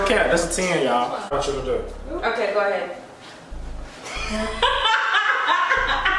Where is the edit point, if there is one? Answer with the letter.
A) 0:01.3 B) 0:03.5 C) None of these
A